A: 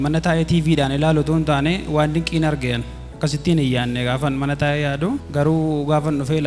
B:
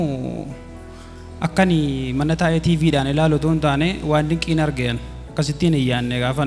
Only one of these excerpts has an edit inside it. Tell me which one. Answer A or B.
A